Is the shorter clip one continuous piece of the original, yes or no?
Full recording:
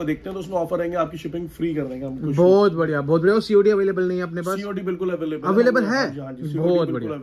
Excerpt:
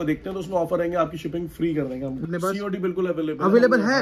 no